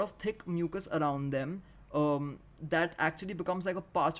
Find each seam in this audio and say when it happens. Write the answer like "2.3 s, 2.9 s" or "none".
none